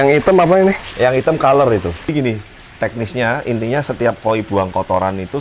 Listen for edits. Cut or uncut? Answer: cut